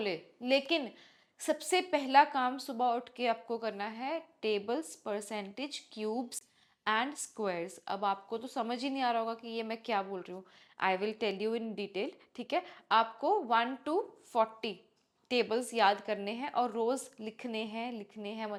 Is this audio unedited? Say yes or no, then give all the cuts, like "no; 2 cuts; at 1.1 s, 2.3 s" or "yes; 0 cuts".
yes; 0 cuts